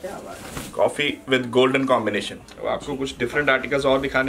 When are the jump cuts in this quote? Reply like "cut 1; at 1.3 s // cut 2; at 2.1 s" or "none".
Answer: cut 1; at 2.5 s